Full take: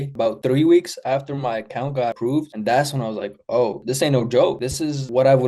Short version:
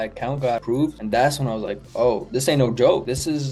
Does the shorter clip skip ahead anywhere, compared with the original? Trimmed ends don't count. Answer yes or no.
no